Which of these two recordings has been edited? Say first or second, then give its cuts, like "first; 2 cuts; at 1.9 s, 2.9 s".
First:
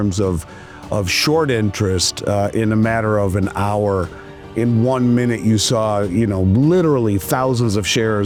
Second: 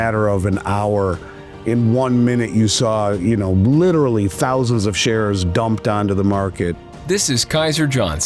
second; 1 cut; at 6.8 s